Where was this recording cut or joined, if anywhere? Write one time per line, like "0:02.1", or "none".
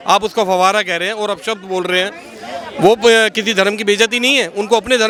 none

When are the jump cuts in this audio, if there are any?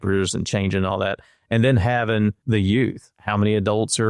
0:02.4
0:03.1

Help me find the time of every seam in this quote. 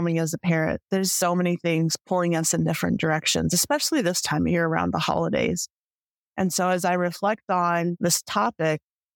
0:01.0
0:08.0

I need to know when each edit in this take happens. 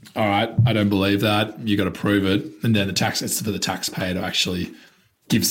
none

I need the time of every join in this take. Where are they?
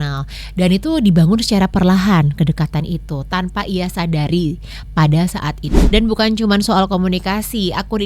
0:05.7

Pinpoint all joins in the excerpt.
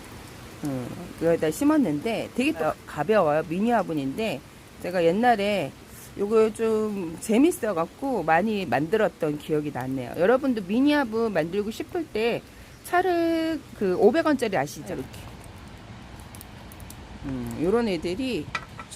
0:02.7
0:14.9

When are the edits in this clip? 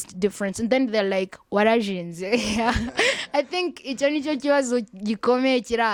none

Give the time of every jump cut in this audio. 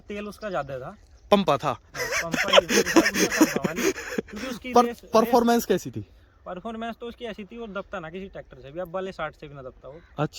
none

